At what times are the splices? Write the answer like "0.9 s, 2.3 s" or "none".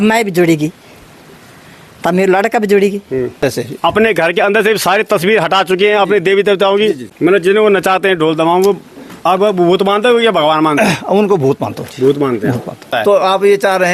3.4 s, 7.1 s, 12.9 s